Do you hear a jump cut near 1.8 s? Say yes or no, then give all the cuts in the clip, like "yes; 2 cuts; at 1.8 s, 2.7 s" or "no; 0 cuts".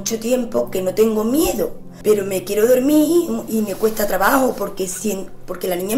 yes; 1 cut; at 1.8 s